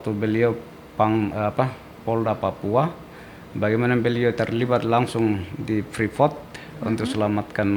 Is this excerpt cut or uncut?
uncut